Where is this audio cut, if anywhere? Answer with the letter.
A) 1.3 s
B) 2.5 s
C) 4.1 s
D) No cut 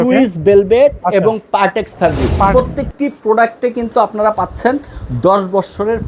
B